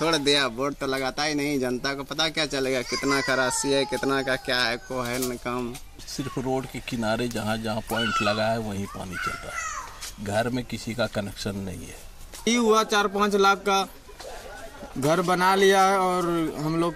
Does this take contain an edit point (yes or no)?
yes